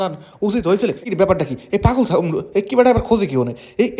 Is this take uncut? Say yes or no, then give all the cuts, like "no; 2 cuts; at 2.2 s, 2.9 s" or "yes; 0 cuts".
no; 1 cut; at 1.0 s